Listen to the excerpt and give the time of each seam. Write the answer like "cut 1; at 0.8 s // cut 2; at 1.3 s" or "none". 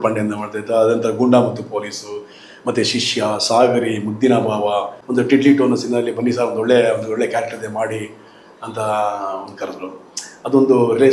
cut 1; at 5.0 s